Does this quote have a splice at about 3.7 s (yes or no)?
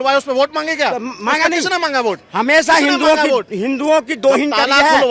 no